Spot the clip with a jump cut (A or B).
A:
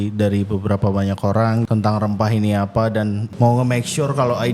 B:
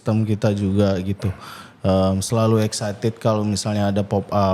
A